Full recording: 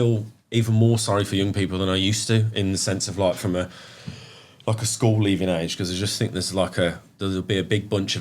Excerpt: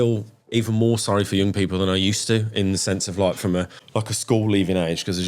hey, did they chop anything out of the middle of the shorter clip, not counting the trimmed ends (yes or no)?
yes